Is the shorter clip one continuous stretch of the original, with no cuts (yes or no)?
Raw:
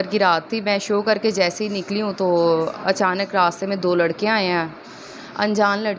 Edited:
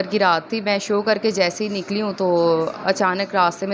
yes